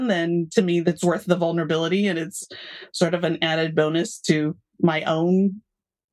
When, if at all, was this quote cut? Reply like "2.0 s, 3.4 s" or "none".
0.8 s, 2.3 s